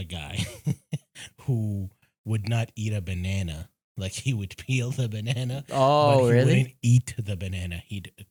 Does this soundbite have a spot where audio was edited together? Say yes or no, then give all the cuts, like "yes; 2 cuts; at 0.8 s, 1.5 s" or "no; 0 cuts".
no; 0 cuts